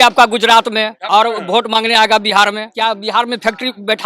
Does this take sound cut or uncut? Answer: cut